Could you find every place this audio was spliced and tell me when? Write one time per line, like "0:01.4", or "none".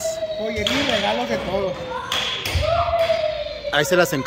none